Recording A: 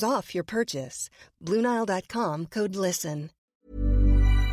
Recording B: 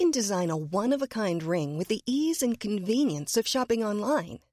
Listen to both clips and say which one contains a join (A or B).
A